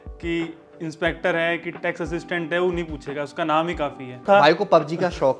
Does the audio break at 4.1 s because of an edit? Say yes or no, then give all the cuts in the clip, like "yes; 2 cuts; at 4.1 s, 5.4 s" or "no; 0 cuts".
yes; 1 cut; at 4.1 s